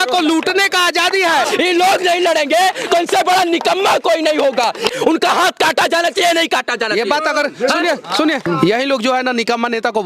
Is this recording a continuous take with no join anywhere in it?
no; 3 cuts; at 1.5 s, 4.9 s, 8.4 s

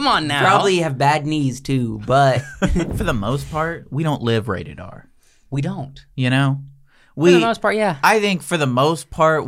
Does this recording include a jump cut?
yes; 1 cut; at 2.9 s

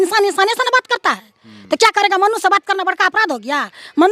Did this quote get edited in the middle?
no; 0 cuts

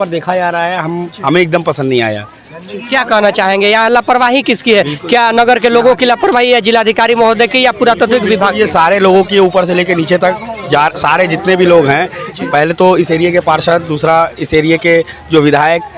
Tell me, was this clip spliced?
no; 0 cuts

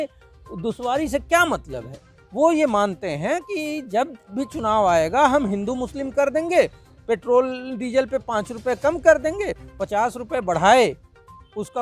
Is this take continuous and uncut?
yes; 0 cuts

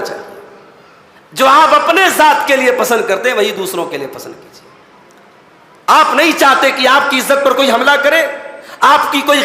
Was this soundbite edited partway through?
no; 0 cuts

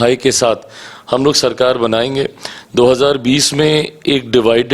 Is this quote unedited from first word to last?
yes; 0 cuts

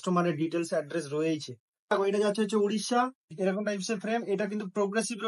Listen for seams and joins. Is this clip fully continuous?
no; 2 cuts; at 1.9 s, 3.2 s

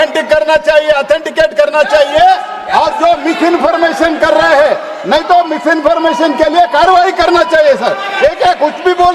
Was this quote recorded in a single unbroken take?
yes; 0 cuts

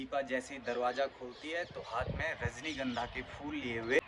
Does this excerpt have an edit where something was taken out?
no; 0 cuts

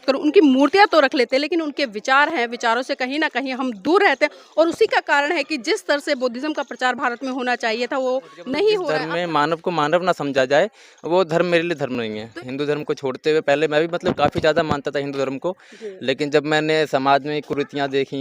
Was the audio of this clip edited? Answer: yes; 2 cuts; at 8.9 s, 12.3 s

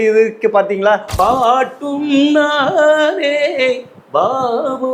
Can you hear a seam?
yes; 1 cut; at 1.1 s

